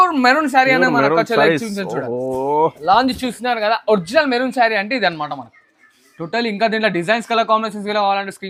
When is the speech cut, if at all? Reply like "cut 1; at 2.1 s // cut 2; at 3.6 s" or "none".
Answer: none